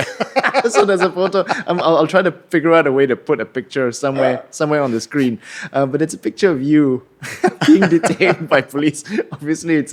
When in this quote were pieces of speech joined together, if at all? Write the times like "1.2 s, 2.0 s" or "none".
none

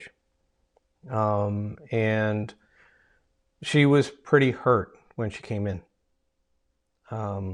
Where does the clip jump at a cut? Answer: none

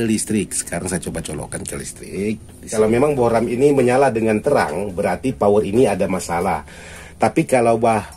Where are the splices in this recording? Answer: 2.7 s

